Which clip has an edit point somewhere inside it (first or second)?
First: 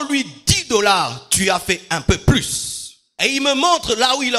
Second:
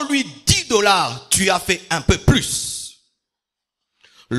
first